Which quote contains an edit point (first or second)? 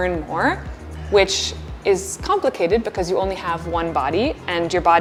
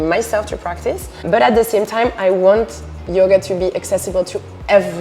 second